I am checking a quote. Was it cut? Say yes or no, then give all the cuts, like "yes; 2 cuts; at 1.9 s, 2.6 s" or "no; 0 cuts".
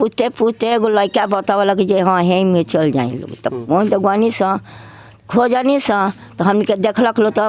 no; 0 cuts